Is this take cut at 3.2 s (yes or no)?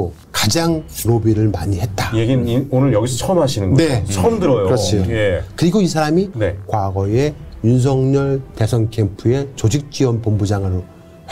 no